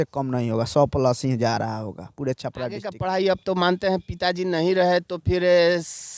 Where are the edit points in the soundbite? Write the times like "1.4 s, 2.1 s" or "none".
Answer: 3.0 s